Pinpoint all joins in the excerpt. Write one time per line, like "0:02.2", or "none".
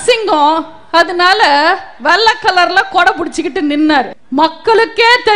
0:04.2